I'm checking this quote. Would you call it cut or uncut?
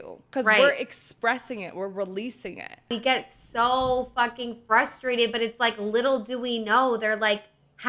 cut